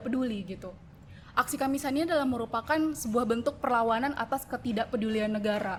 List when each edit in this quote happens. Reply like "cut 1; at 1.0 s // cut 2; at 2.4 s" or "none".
none